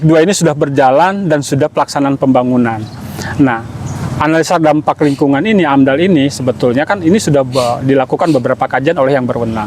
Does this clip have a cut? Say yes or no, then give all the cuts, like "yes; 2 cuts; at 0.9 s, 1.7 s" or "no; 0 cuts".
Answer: no; 0 cuts